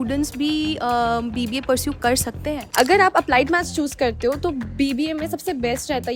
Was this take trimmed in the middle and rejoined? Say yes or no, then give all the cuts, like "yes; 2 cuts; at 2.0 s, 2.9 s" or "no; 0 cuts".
yes; 1 cut; at 2.6 s